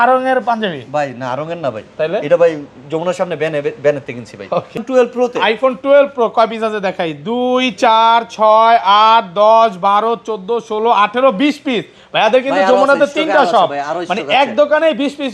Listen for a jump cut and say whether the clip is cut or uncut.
cut